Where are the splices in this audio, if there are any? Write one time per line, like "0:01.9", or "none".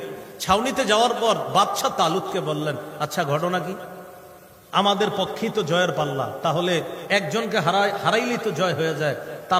none